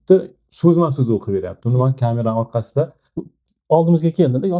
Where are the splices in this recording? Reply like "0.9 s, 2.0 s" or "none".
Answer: 3.3 s